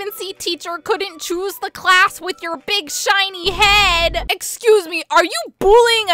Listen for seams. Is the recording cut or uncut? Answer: uncut